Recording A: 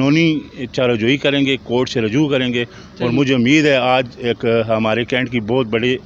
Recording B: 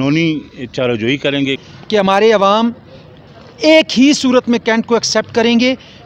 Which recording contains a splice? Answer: B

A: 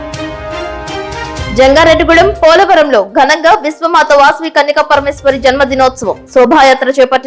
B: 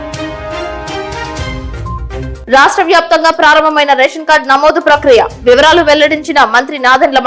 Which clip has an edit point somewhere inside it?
A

